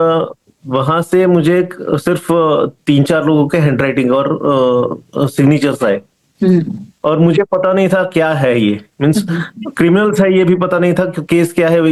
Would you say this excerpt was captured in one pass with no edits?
yes; 0 cuts

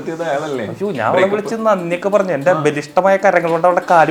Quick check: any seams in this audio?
no; 0 cuts

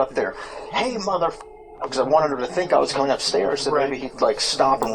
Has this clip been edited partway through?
yes; 1 cut; at 1.9 s

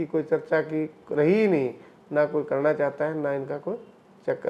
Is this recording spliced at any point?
no; 0 cuts

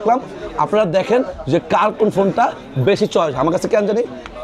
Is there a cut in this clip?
no; 0 cuts

